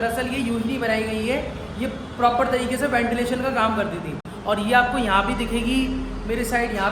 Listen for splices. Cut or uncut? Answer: uncut